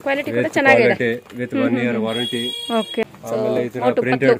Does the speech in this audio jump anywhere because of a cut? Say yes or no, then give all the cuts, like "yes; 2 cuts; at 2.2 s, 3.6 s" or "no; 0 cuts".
yes; 1 cut; at 3.0 s